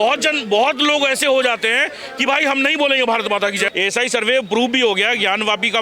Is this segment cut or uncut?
cut